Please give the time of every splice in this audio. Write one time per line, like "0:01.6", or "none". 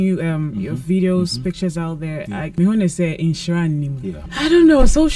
0:02.5
0:04.2